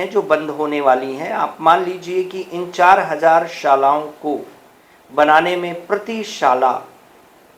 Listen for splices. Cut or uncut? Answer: uncut